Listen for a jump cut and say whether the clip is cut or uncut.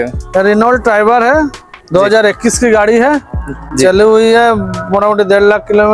uncut